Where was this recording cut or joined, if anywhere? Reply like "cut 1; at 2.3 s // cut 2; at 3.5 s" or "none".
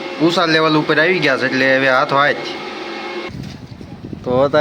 cut 1; at 3.3 s